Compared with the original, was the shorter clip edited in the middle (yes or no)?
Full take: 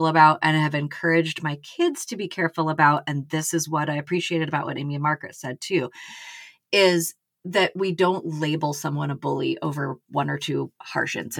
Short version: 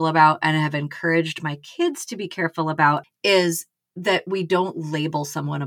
yes